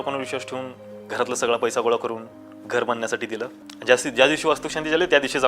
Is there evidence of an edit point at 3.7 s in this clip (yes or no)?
yes